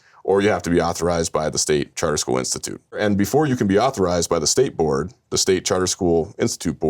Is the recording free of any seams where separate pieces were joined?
no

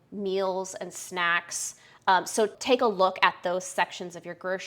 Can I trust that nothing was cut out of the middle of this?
no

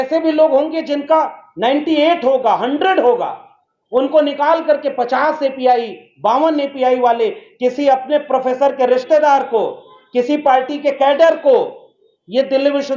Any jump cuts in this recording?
no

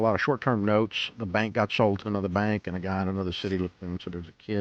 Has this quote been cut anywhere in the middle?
no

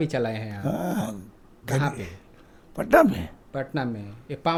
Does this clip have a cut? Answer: no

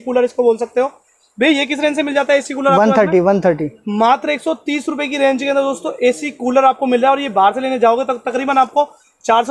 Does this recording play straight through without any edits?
yes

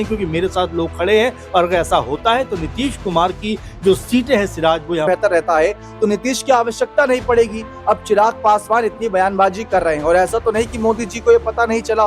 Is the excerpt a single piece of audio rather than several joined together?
no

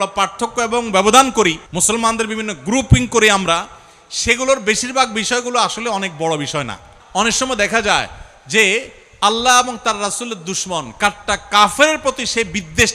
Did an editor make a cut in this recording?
yes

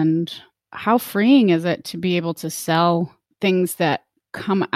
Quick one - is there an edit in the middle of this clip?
yes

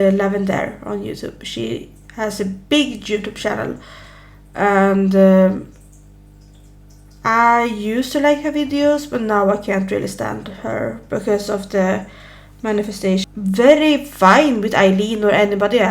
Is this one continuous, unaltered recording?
no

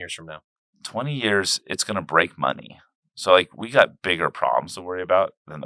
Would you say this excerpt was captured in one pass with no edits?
yes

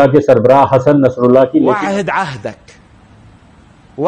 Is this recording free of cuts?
no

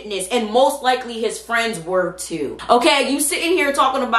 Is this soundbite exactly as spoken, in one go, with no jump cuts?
yes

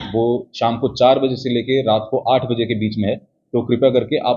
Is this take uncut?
yes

